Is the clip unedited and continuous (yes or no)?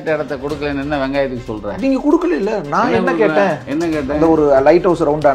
yes